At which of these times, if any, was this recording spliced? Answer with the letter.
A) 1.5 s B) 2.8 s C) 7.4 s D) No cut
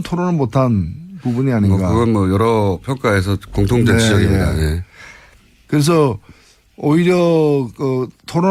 D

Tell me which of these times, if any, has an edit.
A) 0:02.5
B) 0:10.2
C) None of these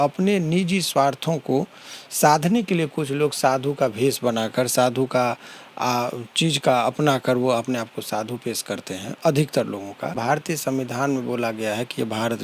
B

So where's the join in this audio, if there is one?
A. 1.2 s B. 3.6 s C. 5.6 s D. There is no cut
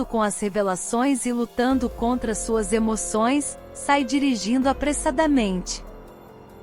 C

